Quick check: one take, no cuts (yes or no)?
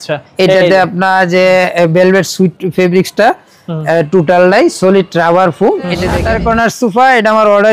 no